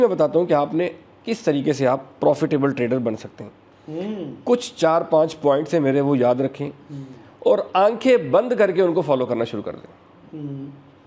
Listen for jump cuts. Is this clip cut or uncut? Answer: uncut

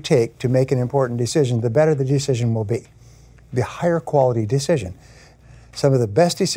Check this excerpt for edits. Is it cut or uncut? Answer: cut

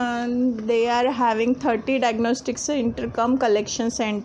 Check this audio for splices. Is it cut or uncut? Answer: uncut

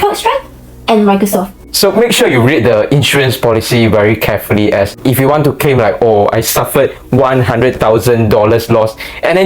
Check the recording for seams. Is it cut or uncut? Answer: cut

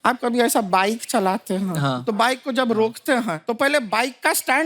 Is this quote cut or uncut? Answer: cut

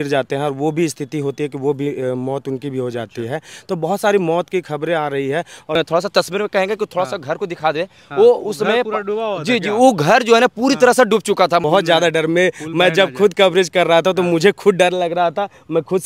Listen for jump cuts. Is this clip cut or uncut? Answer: cut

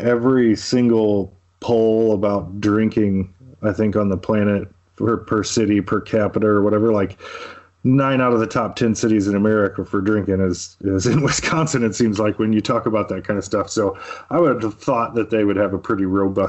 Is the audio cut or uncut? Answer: uncut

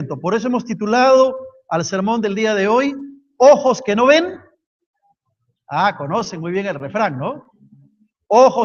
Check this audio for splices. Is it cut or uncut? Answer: uncut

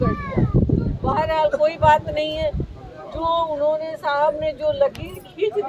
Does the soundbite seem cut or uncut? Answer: uncut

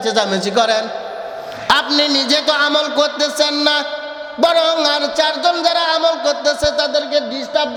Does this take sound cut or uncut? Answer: uncut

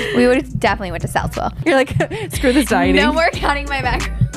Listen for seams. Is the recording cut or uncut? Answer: cut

